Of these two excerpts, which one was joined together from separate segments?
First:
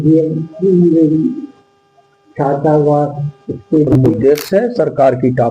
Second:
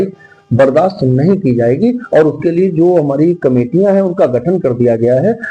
first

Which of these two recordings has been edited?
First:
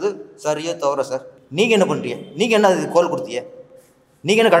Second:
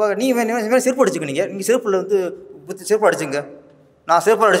first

